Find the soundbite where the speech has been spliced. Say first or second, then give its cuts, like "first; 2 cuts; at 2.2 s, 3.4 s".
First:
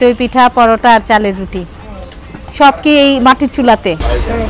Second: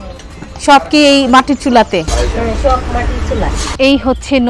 second; 1 cut; at 3.6 s